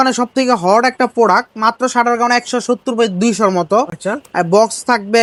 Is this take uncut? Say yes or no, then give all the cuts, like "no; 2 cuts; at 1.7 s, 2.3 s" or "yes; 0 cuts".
yes; 0 cuts